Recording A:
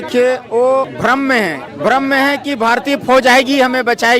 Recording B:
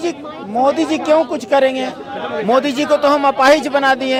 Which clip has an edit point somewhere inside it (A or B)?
A